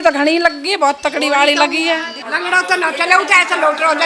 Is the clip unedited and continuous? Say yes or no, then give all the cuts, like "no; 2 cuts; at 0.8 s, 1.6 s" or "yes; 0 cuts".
no; 1 cut; at 2.2 s